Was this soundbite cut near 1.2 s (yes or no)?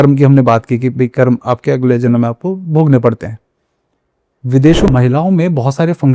no